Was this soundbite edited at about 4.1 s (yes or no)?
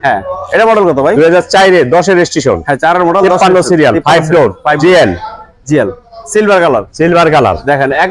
no